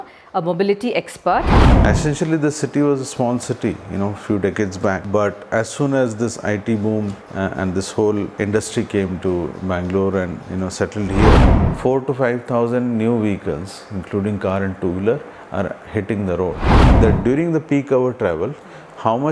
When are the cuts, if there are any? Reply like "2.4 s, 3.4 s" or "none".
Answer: 1.6 s, 5.0 s, 7.2 s, 8.3 s, 11.6 s, 16.9 s